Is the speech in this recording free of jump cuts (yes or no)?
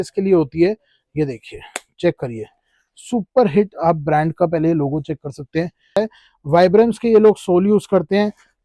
no